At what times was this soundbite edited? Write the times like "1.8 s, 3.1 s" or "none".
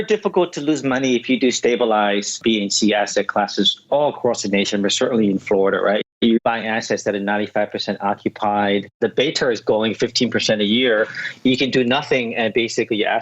2.4 s, 6.0 s, 9.0 s